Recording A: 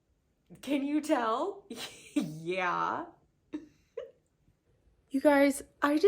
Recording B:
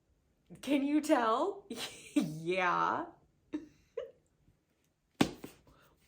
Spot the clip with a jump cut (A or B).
A